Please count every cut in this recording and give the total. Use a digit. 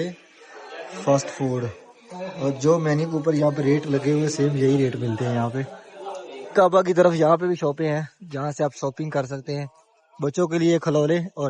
0